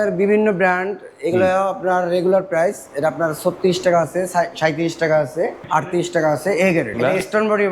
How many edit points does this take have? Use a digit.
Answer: 2